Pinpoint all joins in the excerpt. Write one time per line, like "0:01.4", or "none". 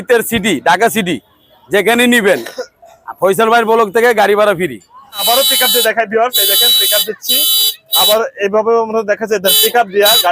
0:05.2

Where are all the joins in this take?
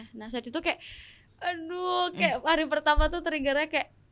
none

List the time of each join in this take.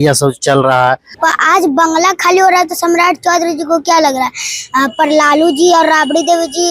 0:01.1

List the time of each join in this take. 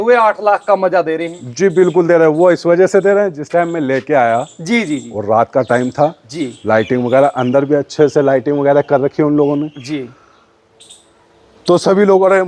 none

